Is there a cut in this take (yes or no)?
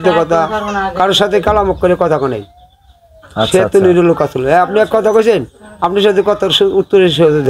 no